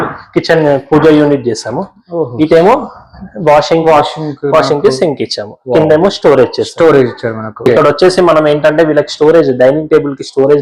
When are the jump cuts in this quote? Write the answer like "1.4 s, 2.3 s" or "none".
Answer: 7.7 s